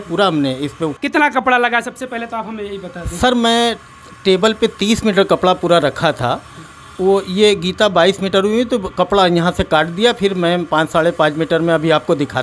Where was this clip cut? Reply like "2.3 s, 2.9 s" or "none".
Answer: 0.9 s